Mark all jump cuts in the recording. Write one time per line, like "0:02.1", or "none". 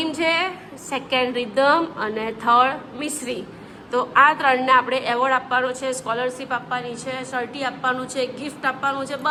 none